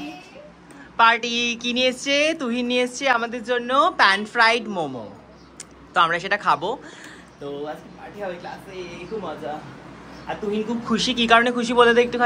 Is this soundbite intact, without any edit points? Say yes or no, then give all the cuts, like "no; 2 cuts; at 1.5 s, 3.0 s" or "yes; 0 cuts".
yes; 0 cuts